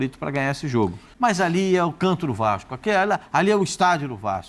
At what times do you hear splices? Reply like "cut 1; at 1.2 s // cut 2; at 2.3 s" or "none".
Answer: cut 1; at 1.0 s

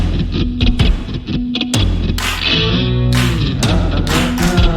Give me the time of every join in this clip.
none

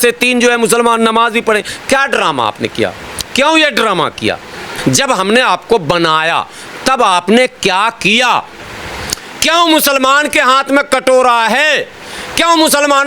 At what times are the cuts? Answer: cut 1; at 4.7 s

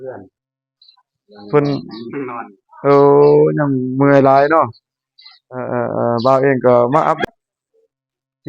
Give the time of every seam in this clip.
cut 1; at 7.3 s

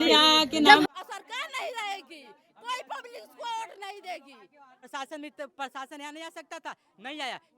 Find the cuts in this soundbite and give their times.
cut 1; at 0.9 s // cut 2; at 4.9 s

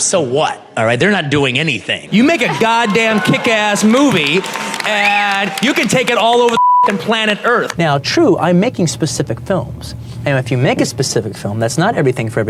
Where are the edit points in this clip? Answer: cut 1; at 2.0 s // cut 2; at 7.7 s

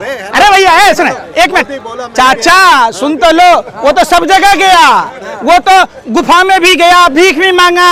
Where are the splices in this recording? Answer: none

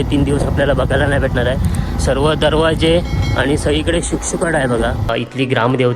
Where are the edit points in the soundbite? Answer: cut 1; at 5.0 s

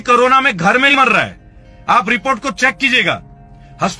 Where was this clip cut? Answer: cut 1; at 0.9 s

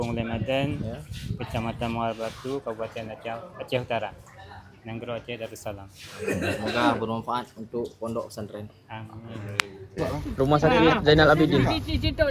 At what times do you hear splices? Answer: cut 1; at 9.9 s

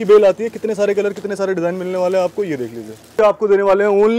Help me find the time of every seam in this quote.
cut 1; at 3.1 s

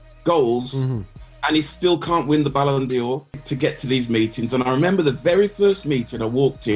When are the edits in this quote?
cut 1; at 3.5 s

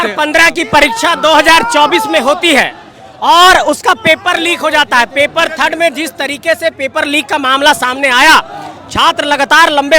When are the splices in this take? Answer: none

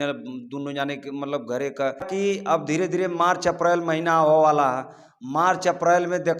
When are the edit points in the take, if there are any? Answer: cut 1; at 2.1 s

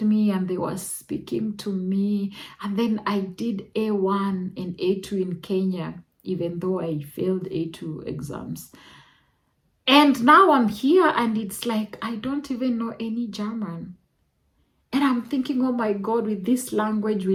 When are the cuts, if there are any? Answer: none

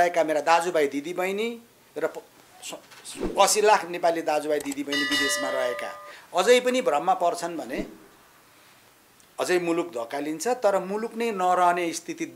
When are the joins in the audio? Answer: none

